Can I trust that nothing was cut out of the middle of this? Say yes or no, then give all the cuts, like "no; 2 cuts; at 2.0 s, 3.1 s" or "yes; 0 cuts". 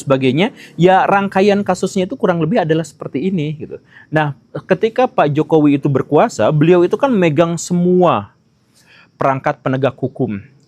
yes; 0 cuts